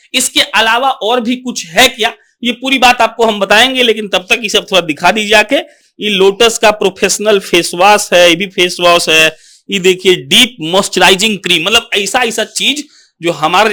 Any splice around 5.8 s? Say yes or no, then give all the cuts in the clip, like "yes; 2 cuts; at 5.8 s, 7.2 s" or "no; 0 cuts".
no; 0 cuts